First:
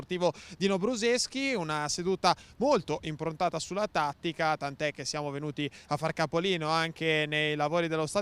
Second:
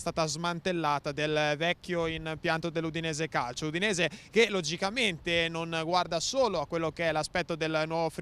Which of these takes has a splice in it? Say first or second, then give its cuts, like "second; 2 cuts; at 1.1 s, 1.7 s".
second; 1 cut; at 4.8 s